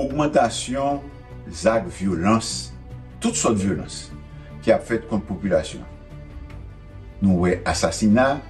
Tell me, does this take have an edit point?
yes; 2 cuts; at 5.8 s, 7.2 s

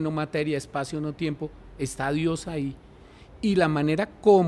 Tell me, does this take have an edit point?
no; 0 cuts

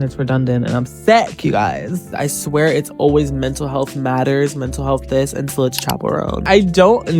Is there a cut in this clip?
yes; 2 cuts; at 2.1 s, 6.4 s

